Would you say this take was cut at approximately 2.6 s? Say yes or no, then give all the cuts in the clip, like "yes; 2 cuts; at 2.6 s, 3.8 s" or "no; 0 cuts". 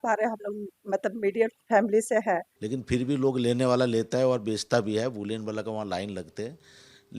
yes; 1 cut; at 2.6 s